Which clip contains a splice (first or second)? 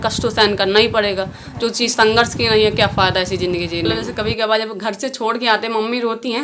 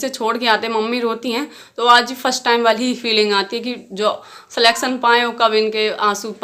first